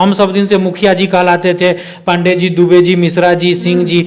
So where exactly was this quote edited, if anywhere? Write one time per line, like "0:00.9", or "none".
none